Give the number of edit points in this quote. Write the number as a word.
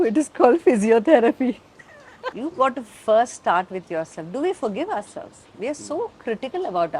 one